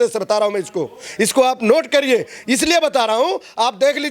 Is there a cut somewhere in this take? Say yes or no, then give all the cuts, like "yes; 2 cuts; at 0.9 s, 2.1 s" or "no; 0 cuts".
no; 0 cuts